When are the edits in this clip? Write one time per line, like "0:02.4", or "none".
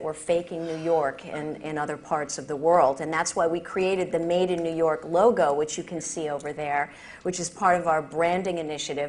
0:03.7

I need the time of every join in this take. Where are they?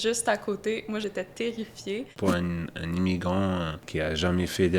0:01.0
0:02.1
0:03.8

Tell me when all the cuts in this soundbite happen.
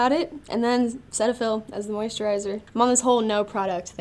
none

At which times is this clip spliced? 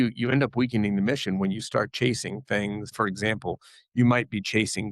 0:02.9

